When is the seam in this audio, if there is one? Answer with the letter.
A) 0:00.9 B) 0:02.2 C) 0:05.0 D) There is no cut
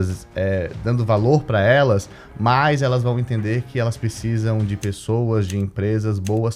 D